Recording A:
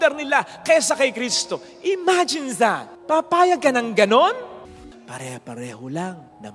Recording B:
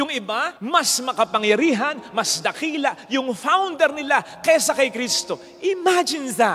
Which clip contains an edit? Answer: A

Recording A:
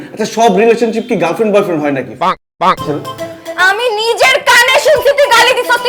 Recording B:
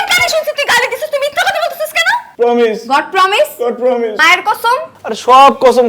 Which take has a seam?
B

